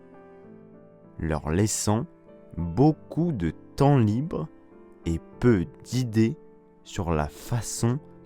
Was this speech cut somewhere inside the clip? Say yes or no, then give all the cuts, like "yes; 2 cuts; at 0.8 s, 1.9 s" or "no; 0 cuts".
yes; 1 cut; at 1.1 s